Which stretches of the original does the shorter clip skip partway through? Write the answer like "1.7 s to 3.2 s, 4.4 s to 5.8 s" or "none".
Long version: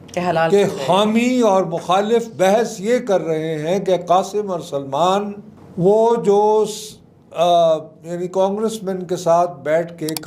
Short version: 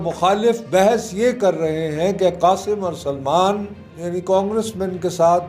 5.6 s to 8.0 s